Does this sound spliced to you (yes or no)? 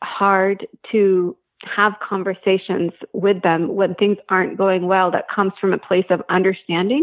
no